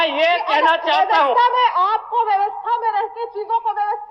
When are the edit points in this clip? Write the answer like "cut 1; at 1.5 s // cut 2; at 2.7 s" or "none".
none